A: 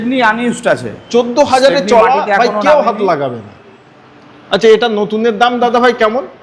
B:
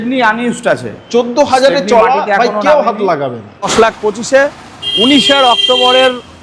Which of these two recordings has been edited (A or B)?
B